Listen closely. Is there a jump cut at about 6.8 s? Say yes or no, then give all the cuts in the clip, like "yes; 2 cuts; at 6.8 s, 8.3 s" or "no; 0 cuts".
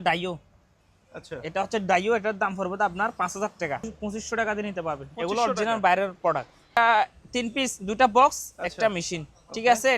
yes; 2 cuts; at 3.9 s, 6.8 s